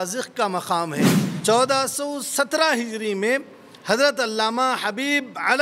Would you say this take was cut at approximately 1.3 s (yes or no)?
yes